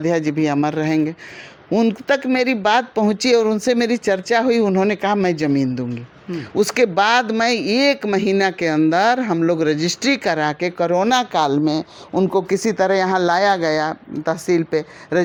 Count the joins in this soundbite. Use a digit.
0